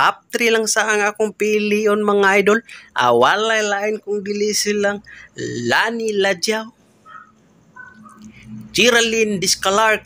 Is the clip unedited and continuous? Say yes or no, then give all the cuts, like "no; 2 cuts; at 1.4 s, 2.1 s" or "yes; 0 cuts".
yes; 0 cuts